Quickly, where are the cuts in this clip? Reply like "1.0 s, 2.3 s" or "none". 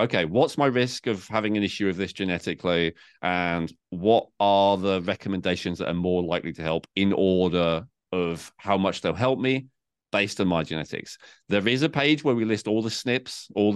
none